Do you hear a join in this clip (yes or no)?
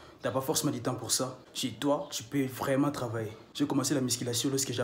yes